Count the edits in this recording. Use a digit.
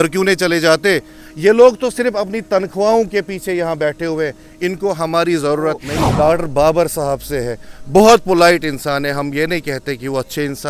1